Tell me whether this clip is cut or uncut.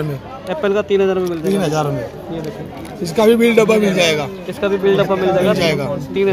uncut